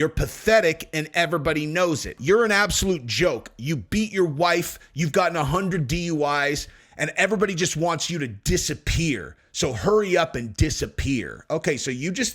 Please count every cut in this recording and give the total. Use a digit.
1